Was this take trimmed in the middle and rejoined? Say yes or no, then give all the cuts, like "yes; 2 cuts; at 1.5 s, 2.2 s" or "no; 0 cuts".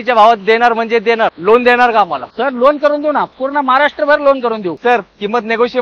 yes; 2 cuts; at 1.4 s, 4.8 s